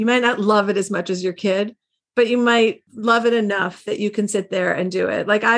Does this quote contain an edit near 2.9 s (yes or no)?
yes